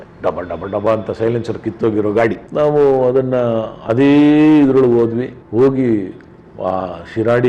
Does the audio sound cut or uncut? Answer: uncut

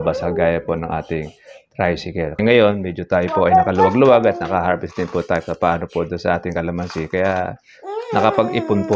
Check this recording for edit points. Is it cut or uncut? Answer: cut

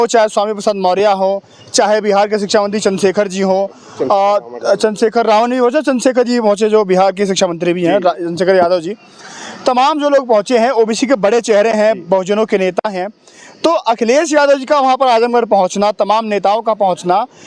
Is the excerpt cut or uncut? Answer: uncut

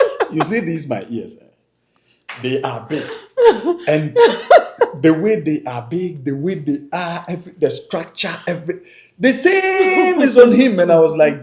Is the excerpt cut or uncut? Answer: uncut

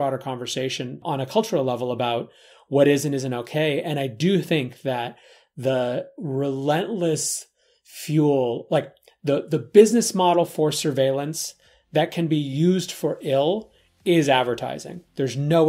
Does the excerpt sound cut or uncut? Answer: cut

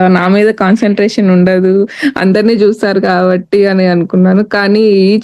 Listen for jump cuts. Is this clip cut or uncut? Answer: uncut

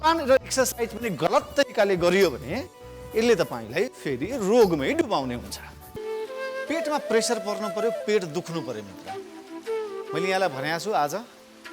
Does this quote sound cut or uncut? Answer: cut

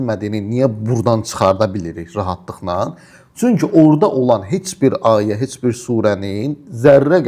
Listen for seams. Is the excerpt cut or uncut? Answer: uncut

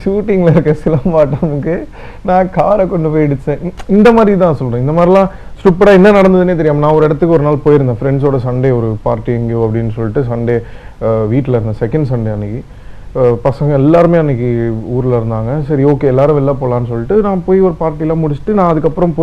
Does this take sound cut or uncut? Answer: uncut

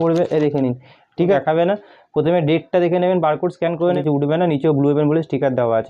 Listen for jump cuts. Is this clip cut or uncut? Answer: cut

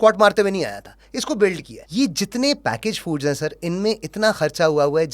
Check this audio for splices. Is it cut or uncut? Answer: cut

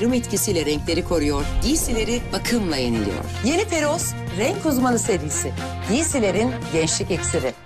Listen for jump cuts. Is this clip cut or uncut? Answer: uncut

